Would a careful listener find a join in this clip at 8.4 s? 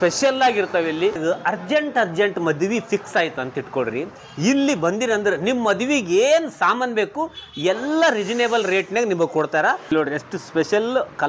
no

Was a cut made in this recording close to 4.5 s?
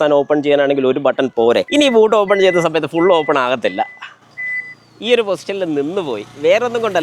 no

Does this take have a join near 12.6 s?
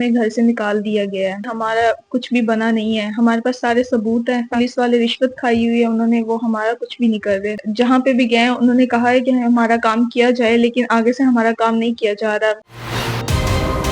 yes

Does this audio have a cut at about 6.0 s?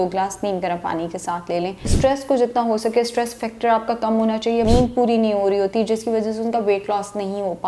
no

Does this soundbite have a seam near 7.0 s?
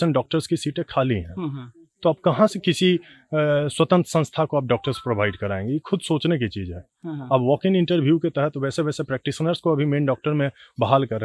no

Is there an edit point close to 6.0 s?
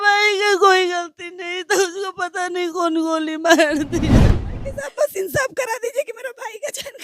no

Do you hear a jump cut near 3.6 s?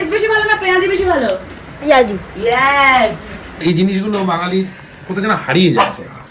yes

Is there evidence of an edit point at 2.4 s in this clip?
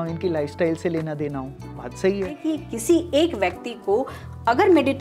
yes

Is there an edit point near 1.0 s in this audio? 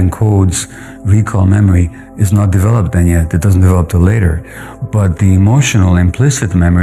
no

